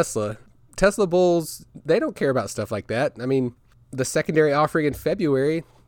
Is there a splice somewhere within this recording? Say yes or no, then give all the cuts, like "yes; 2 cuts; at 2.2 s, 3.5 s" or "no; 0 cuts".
no; 0 cuts